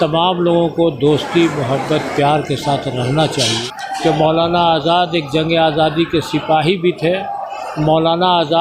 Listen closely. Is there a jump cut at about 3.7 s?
yes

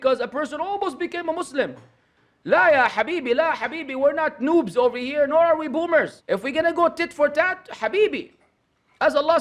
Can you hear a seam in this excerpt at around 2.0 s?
no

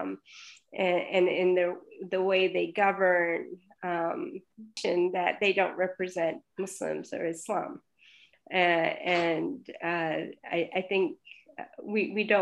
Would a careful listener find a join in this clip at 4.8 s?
yes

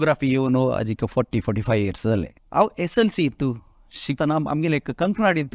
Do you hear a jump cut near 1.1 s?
no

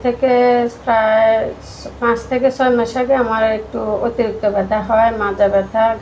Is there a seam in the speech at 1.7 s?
no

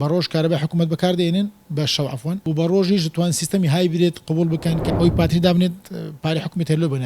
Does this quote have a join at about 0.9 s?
no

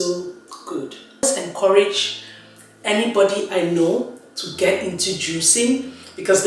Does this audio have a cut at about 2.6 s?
no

